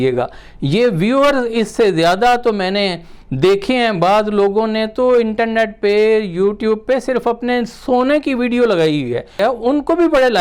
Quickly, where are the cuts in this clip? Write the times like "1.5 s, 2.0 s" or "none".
9.4 s